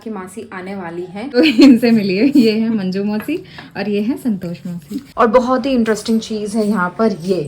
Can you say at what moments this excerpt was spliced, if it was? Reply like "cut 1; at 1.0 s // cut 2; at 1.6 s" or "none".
cut 1; at 1.4 s // cut 2; at 5.0 s